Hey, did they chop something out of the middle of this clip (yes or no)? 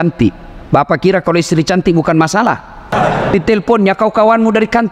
yes